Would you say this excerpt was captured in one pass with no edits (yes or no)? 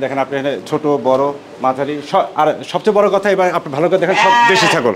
yes